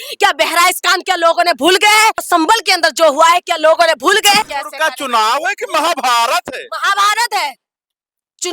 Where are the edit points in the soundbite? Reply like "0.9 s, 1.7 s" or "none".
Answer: 2.2 s, 4.4 s